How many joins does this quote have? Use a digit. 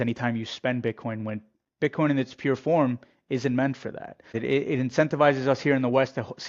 1